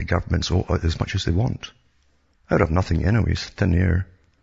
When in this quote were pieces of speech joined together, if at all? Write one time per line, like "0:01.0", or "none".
none